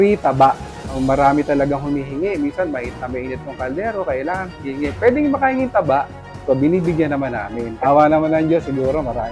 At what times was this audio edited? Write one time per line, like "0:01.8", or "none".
0:01.0
0:07.6